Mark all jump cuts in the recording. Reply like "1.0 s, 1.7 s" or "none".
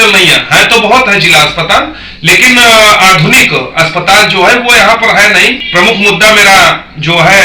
5.6 s

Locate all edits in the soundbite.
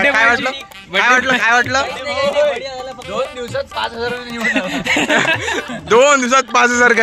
none

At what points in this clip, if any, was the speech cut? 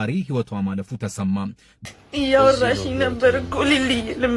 1.7 s

